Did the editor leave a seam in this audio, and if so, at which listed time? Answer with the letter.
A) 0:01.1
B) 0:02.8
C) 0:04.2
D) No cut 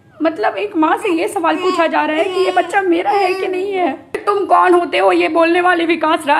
C